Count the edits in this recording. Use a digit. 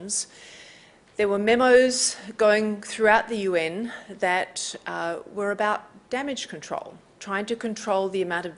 1